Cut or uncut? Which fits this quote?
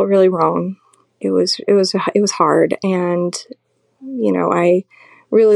uncut